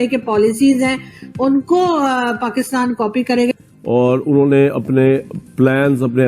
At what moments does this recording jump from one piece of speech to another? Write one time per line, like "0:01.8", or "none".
0:03.5